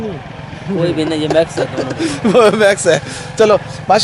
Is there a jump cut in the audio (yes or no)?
no